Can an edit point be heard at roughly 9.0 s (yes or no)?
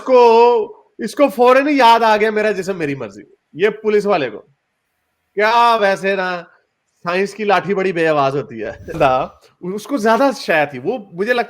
yes